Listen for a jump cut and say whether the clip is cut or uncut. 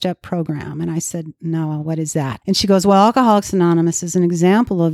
cut